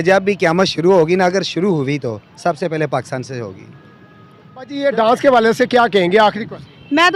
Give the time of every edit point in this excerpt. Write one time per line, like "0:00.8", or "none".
0:04.7